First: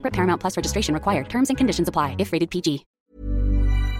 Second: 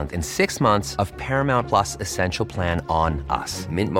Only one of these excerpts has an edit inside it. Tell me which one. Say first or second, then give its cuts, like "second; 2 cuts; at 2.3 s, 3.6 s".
first; 1 cut; at 2.9 s